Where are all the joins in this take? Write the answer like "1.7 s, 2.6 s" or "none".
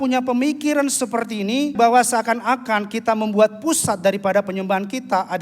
1.7 s